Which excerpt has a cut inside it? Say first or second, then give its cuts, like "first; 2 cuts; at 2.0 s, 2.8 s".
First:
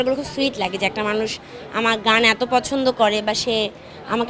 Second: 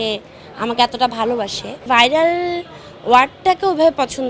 second; 1 cut; at 1.8 s